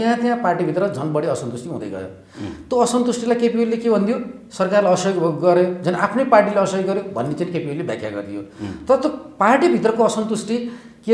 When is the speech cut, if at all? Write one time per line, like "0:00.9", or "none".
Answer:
none